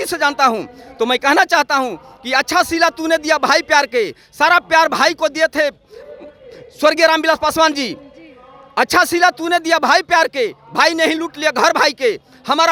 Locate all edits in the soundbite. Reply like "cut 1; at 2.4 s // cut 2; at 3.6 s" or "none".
none